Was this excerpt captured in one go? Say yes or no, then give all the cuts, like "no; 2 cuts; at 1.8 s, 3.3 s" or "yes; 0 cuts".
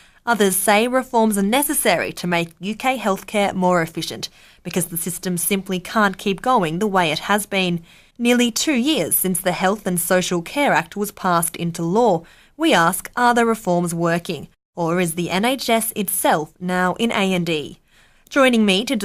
no; 1 cut; at 16.8 s